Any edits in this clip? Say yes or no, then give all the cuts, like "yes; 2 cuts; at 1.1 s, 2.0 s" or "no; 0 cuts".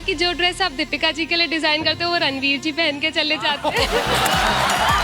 no; 0 cuts